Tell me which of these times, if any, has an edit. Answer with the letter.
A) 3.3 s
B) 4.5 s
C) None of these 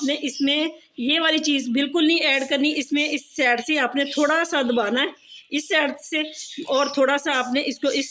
C